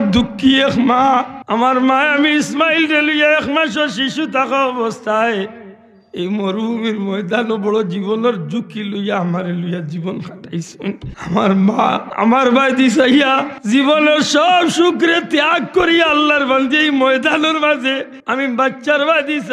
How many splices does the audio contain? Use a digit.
5